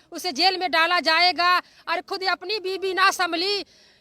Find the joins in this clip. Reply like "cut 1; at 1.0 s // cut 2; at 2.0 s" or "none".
none